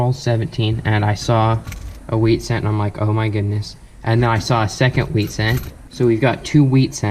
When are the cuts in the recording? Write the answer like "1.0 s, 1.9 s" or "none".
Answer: 5.8 s